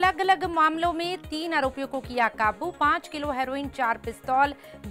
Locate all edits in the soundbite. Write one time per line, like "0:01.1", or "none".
none